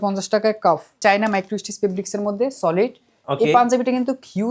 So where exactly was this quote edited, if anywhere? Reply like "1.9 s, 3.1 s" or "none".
1.0 s